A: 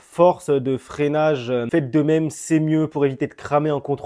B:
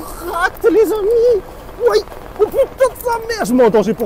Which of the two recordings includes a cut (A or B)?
A